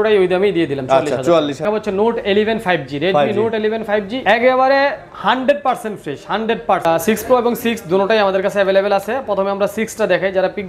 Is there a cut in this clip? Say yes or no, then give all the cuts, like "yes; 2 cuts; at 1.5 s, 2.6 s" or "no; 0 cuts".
yes; 3 cuts; at 1.6 s, 4.1 s, 6.9 s